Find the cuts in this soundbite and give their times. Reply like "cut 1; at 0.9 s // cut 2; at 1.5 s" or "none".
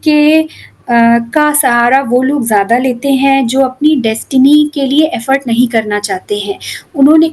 none